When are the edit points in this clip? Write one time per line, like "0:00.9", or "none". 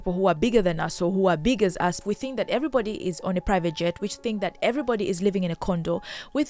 0:02.0